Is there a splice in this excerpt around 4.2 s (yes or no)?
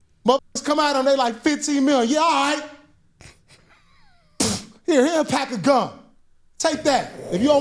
no